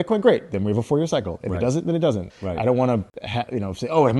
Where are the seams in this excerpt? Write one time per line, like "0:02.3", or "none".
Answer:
0:02.3
0:03.2